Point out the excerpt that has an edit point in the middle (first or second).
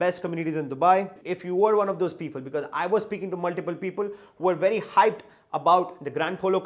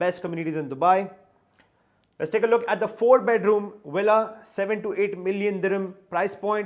first